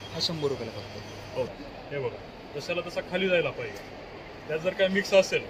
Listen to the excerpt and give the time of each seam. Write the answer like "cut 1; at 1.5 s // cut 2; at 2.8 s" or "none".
cut 1; at 1.6 s